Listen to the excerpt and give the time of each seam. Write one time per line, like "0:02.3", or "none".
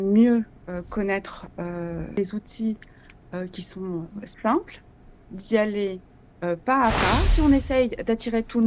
0:02.2
0:07.3